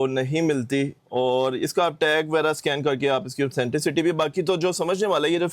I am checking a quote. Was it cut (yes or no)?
yes